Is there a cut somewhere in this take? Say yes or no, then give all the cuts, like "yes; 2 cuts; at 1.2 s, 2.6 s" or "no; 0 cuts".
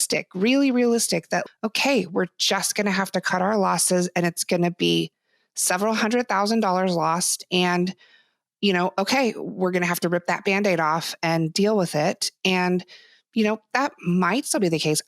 yes; 1 cut; at 1.4 s